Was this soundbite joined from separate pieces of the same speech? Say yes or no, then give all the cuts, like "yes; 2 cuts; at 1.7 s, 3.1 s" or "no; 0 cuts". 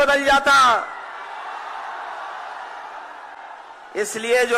no; 0 cuts